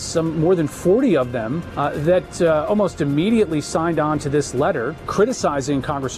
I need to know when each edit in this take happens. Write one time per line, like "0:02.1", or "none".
0:01.6
0:05.1

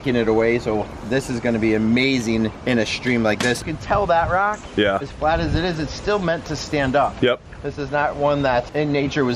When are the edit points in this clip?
0:03.6

